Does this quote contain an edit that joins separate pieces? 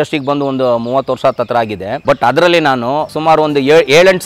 yes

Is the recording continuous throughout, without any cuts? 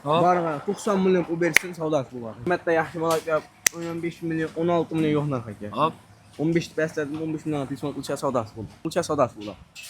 no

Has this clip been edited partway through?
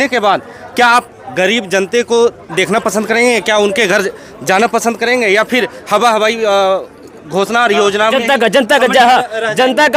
no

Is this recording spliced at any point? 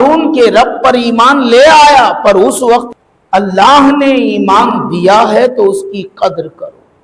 yes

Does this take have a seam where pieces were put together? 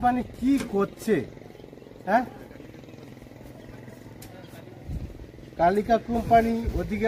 no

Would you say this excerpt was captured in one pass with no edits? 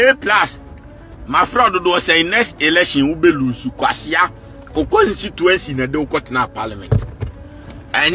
yes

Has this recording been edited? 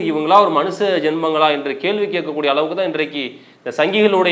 no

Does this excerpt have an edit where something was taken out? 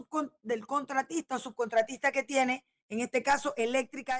no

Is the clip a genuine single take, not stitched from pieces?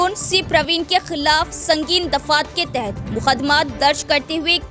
yes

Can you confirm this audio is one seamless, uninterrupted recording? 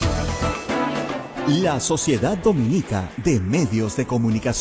no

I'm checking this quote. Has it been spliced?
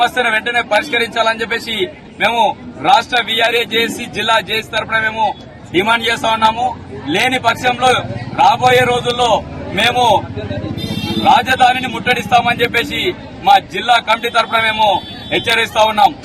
no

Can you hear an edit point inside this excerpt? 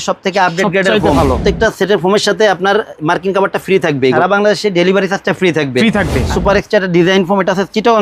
yes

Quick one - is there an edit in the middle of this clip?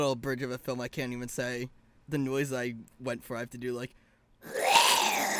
yes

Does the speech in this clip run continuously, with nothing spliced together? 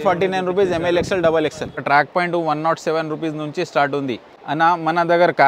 no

